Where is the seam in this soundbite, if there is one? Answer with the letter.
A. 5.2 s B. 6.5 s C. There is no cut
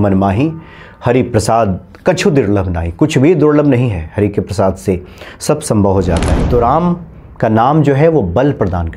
B